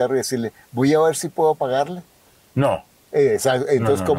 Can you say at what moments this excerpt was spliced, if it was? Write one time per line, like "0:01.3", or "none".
none

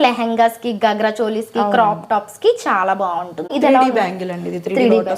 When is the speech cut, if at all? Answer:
0:03.5

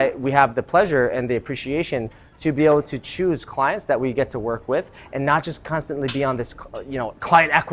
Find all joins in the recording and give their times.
none

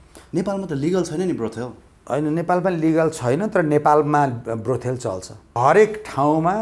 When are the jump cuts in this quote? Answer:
0:05.5

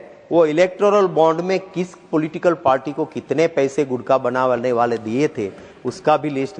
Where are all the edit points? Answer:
none

